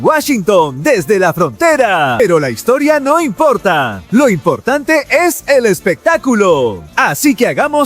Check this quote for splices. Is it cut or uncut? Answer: cut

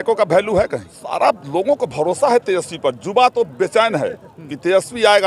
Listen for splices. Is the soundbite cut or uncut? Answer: cut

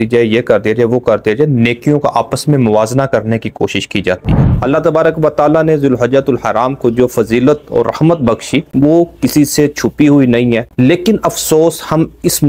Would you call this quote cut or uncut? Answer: cut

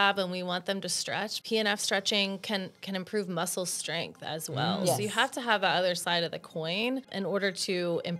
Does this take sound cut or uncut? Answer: cut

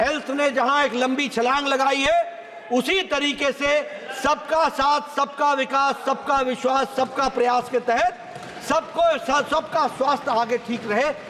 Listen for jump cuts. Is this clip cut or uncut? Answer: uncut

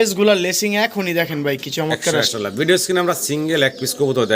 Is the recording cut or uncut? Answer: cut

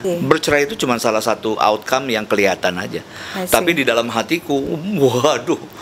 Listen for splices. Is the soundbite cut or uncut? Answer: uncut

